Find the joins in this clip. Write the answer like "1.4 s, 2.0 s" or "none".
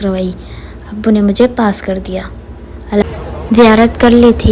3.1 s